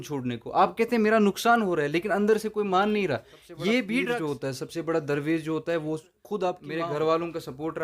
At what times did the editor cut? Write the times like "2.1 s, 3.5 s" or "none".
4.2 s, 6.6 s